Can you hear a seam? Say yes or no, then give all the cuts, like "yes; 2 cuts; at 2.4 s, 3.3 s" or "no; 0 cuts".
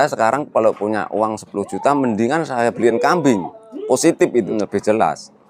yes; 1 cut; at 4.5 s